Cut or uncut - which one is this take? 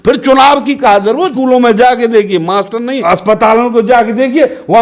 cut